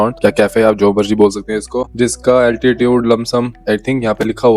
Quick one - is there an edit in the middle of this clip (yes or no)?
no